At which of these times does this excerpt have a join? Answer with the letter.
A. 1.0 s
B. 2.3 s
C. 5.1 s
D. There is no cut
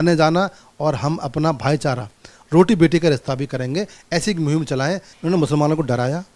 C